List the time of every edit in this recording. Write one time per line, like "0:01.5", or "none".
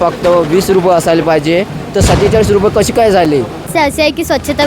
0:03.7